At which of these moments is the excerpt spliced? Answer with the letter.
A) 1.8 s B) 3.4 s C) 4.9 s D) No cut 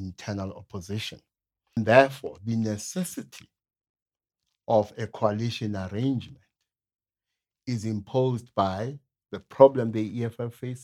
A